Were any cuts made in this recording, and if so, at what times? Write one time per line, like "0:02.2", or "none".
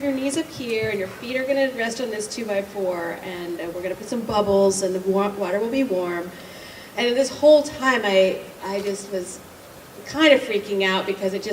0:04.1